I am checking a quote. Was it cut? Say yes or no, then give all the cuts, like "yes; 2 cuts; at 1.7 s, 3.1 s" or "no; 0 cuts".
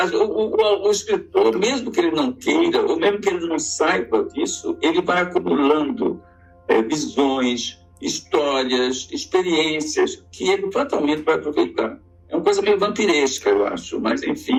no; 0 cuts